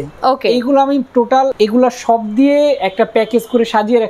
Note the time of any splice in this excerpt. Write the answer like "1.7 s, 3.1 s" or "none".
1.5 s